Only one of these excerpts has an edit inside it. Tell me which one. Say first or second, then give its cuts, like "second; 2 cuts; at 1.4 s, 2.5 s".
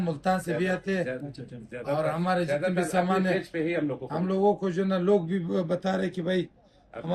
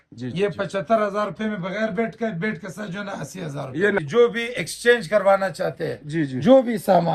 second; 1 cut; at 4.0 s